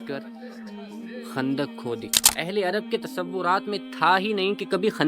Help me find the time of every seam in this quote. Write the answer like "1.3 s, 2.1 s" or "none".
2.3 s